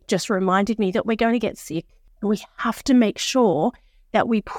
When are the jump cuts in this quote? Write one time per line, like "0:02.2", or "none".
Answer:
0:02.1